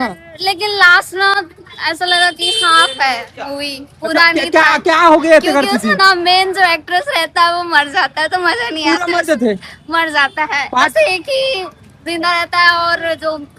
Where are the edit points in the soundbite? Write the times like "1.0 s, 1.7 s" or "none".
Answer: none